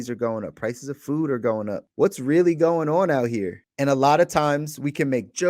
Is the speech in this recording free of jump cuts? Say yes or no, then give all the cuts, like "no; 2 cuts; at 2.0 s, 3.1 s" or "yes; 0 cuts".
no; 2 cuts; at 1.8 s, 3.6 s